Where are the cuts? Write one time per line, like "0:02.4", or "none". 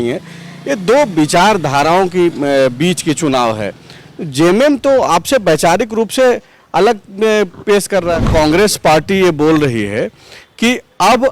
0:08.2

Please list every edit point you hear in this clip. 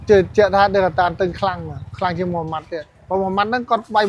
none

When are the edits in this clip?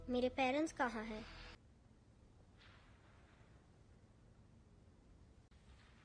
0:01.6

